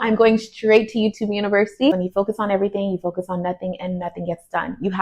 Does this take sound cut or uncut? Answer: cut